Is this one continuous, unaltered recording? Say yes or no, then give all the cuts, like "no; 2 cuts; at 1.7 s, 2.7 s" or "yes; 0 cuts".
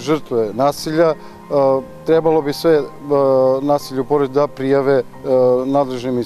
yes; 0 cuts